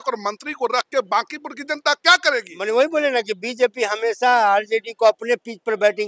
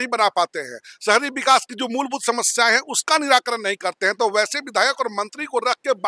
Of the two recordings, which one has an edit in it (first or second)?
first